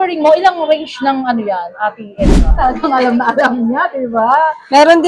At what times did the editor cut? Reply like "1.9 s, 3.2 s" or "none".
2.5 s

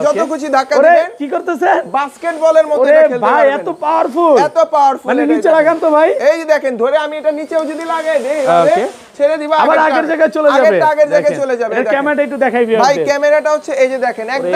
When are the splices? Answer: none

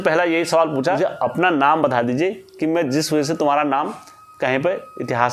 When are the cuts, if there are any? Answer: 1.0 s

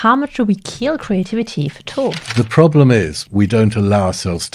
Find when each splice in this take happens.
2.2 s, 3.2 s

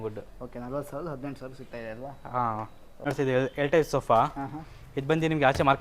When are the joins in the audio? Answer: 2.9 s

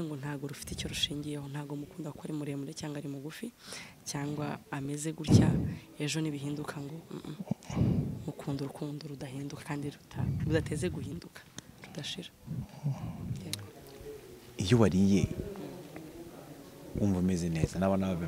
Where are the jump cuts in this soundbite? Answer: 13.7 s

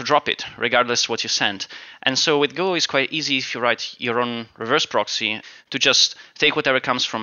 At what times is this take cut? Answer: none

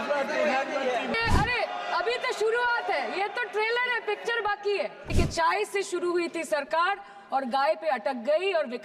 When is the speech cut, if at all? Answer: 1.2 s, 5.1 s

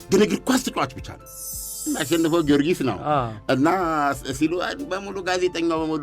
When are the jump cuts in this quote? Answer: 1.8 s

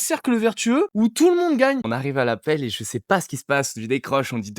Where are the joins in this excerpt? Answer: 0.9 s, 1.9 s

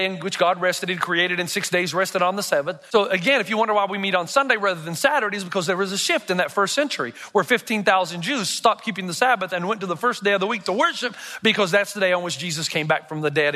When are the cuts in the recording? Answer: 2.8 s

